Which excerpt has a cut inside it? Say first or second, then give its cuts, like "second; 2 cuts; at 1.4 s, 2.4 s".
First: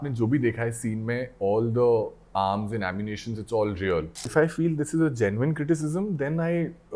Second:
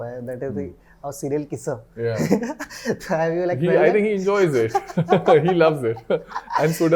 first; 1 cut; at 4.3 s